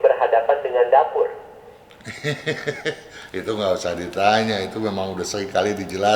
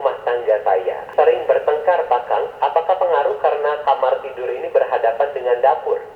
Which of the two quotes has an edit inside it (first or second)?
second